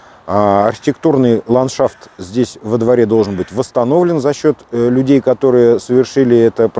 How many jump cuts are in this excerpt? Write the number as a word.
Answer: zero